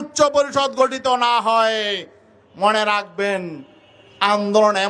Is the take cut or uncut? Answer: uncut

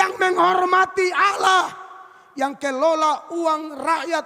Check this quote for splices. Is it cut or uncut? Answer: uncut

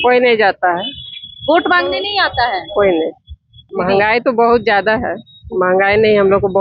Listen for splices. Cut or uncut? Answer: cut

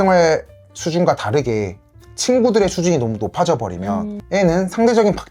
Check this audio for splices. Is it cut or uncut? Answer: cut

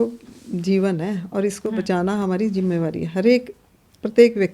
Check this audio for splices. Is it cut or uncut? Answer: uncut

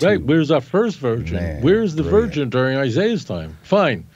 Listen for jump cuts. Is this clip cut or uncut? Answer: uncut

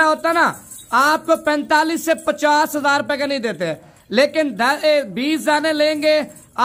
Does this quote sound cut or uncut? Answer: uncut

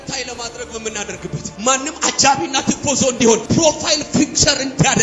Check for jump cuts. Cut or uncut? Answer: cut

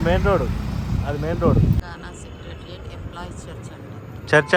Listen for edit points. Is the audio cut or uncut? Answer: cut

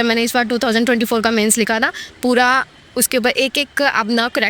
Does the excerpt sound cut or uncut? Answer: uncut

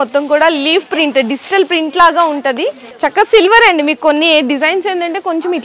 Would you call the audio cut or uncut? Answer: cut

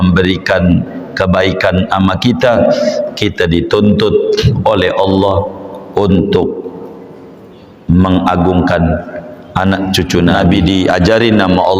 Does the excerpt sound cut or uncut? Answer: cut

